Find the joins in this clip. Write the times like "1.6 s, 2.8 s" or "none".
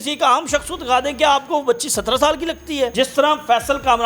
2.9 s